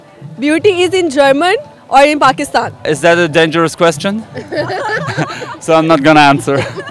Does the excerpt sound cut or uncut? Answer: cut